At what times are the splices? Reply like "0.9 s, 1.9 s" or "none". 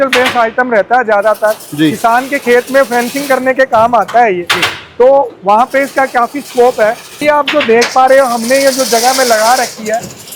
7.2 s

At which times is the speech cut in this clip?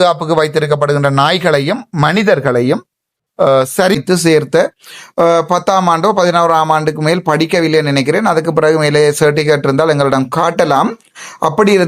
4.0 s

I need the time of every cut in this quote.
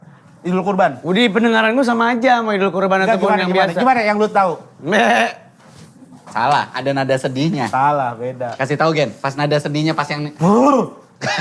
none

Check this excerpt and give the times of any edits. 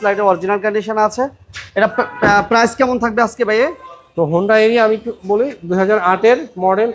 none

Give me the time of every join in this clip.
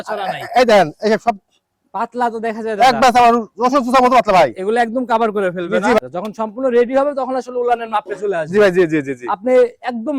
6.0 s

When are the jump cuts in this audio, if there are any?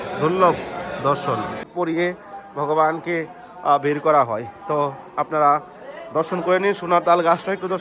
1.7 s

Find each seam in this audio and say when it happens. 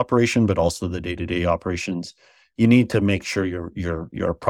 none

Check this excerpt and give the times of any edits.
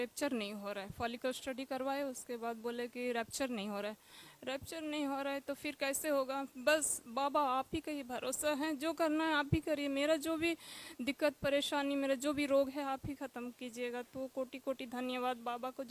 none

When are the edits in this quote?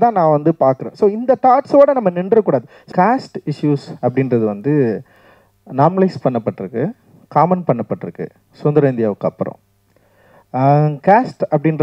2.9 s

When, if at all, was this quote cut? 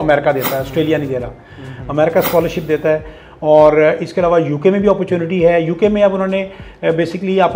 none

